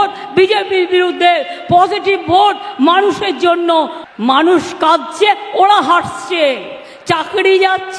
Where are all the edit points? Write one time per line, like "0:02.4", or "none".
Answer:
0:04.0